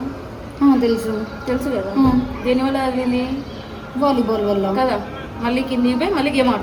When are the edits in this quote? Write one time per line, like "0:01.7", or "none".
none